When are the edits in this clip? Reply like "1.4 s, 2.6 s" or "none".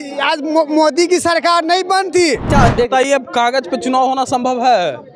2.4 s